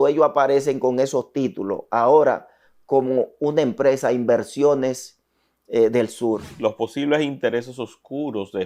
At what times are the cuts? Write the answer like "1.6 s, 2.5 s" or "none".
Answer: 6.5 s